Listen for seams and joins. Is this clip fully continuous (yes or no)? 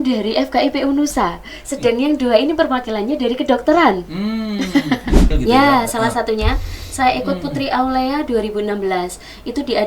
no